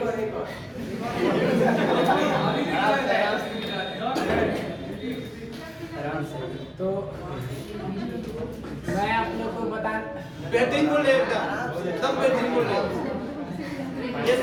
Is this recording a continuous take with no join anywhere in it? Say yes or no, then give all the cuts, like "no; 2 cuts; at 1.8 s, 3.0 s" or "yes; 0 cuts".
yes; 0 cuts